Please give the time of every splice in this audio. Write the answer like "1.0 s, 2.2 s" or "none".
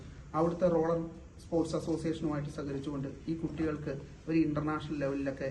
none